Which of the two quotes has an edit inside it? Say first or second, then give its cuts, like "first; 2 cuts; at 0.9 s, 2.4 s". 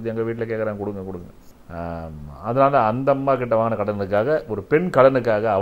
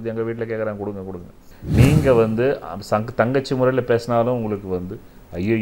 second; 1 cut; at 1.6 s